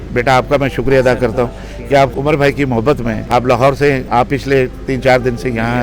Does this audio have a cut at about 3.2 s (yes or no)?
yes